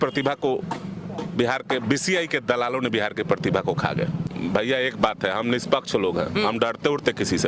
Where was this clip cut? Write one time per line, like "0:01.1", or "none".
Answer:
0:04.2